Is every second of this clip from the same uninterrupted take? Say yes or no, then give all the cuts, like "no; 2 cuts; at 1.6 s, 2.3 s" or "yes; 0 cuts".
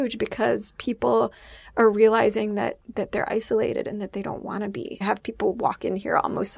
no; 1 cut; at 5.0 s